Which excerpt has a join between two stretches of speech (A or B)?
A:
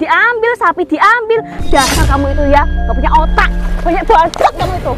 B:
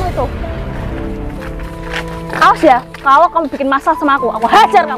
A